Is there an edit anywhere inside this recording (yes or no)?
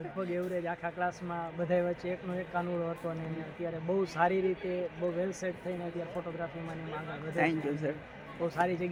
no